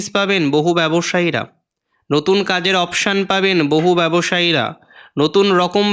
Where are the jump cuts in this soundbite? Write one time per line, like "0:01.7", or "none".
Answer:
none